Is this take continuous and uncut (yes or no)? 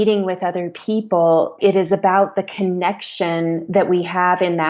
no